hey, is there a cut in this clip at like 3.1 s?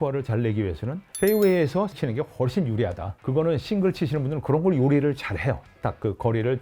yes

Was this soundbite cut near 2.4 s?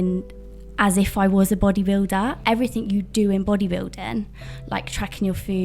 yes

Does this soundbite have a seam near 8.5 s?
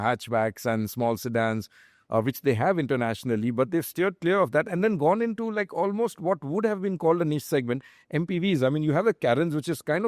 no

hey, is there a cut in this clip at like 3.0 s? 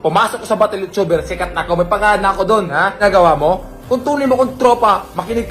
yes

